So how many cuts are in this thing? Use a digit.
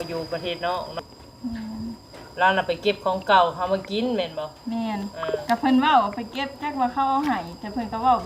1